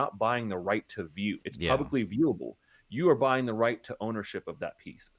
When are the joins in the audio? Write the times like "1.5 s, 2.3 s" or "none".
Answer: 1.5 s